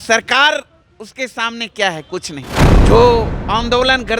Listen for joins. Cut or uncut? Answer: cut